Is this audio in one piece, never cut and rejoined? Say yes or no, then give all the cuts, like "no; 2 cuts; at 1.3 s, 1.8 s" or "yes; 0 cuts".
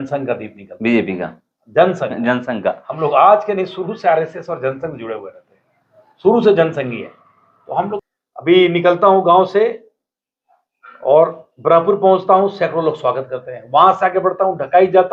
no; 1 cut; at 8.0 s